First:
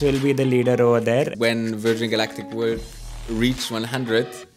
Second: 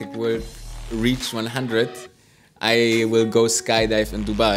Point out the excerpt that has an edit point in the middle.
first; 1 cut; at 1.3 s

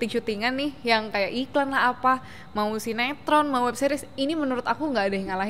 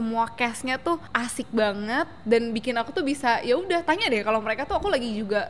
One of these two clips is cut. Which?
second; 1 cut; at 1.1 s

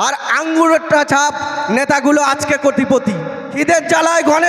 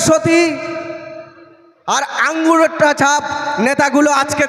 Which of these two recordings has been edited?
first; 1 cut; at 3.6 s

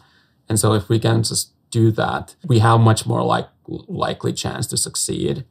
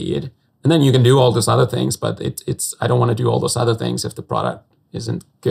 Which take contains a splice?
first; 1 cut; at 2.3 s

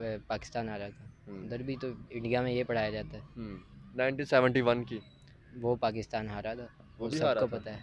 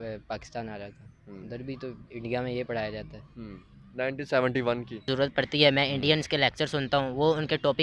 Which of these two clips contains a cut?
second; 1 cut; at 5.1 s

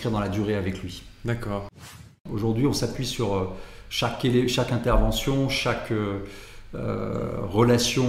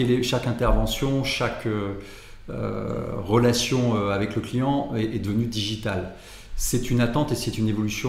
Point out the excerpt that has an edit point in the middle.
first; 1 cut; at 2.0 s

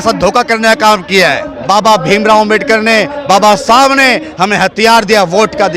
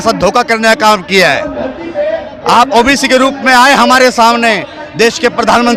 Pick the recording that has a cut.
first; 1 cut; at 1.5 s

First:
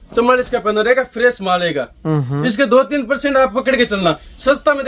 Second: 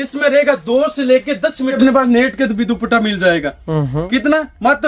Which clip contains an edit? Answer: second; 1 cut; at 1.8 s

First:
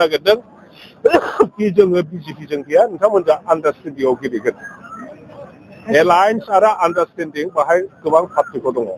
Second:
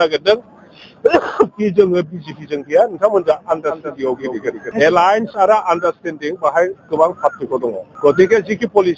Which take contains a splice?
second; 2 cuts; at 4.6 s, 7.8 s

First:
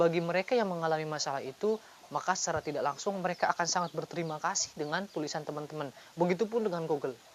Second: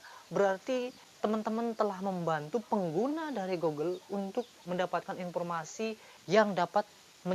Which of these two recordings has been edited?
second; 3 cuts; at 1.0 s, 4.6 s, 6.1 s

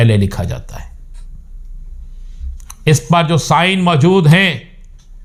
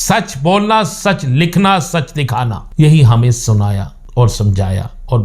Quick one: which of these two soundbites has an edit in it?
second; 2 cuts; at 2.6 s, 3.9 s

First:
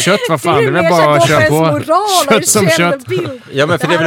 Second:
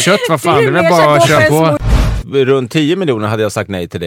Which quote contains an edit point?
second; 1 cut; at 2.1 s

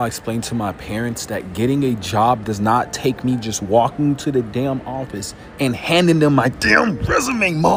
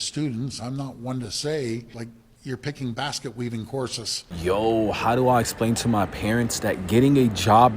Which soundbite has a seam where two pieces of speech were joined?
second; 1 cut; at 4.3 s

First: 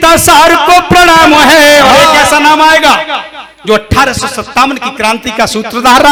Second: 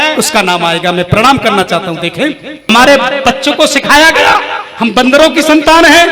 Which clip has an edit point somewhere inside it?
second; 1 cut; at 2.7 s

